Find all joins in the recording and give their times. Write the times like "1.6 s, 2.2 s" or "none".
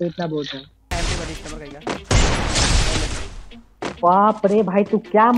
0.9 s